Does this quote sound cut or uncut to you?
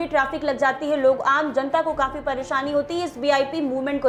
uncut